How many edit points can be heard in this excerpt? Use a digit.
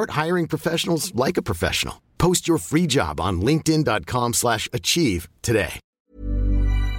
1